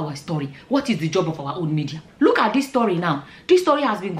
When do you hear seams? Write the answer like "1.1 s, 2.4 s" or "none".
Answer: 2.1 s